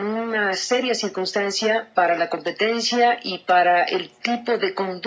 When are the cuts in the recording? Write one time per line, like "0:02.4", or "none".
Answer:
0:02.0